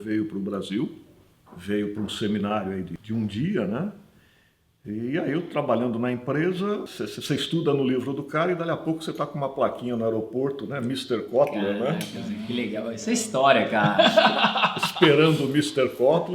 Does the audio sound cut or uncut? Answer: cut